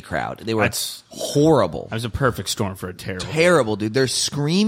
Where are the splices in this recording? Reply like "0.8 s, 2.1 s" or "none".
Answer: none